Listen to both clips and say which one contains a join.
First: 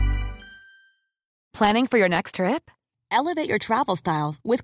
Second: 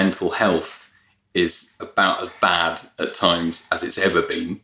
first; 1 cut; at 1.5 s

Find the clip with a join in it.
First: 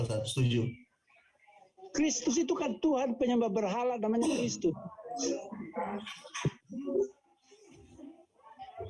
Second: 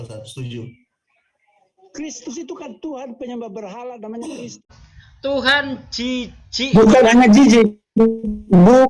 second; 1 cut; at 4.6 s

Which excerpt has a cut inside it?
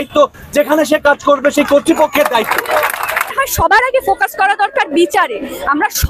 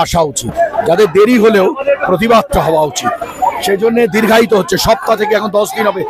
first; 1 cut; at 3.3 s

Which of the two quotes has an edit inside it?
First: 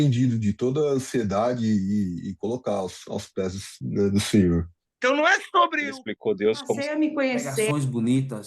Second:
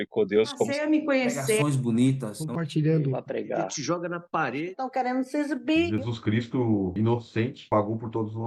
first; 1 cut; at 4.8 s

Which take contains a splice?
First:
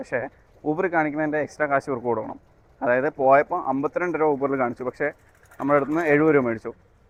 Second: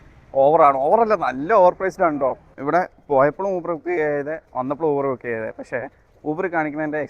second; 1 cut; at 2.5 s

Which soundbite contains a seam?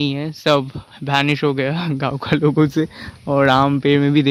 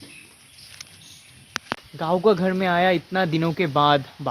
second; 1 cut; at 1.8 s

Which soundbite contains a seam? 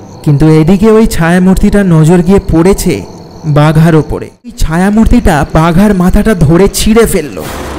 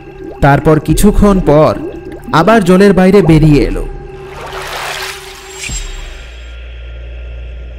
first; 1 cut; at 4.6 s

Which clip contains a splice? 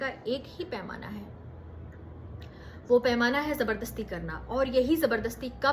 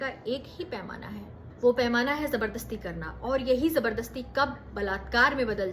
second; 1 cut; at 1.4 s

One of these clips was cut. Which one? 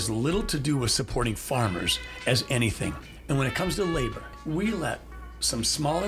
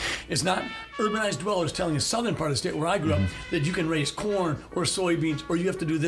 first; 2 cuts; at 3.1 s, 4.3 s

